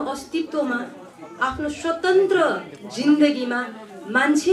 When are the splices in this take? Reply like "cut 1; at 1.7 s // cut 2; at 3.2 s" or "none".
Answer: none